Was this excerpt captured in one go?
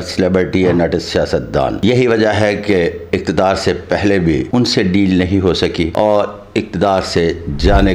no; 2 cuts; at 4.5 s, 5.9 s

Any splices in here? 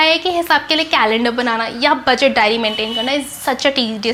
no; 0 cuts

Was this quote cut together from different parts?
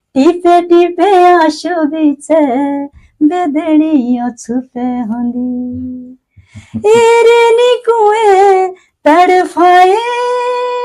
no; 0 cuts

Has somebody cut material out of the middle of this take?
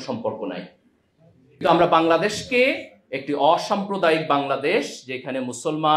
yes; 1 cut; at 1.6 s

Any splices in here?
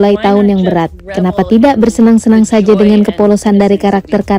no; 0 cuts

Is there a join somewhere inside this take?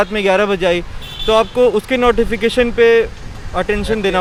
no; 0 cuts

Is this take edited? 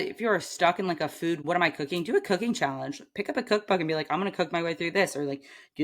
yes; 1 cut; at 1.4 s

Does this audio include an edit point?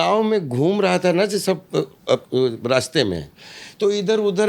yes; 1 cut; at 2.3 s

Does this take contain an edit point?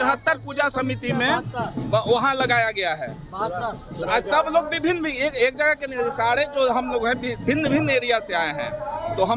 no; 0 cuts

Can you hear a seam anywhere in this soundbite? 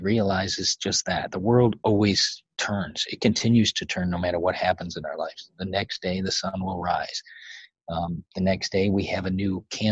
no; 0 cuts

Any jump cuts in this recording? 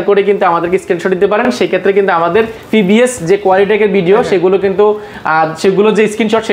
no; 0 cuts

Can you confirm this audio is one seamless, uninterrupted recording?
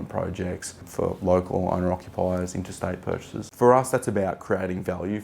no; 1 cut; at 3.4 s

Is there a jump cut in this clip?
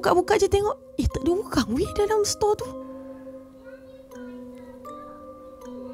no; 0 cuts

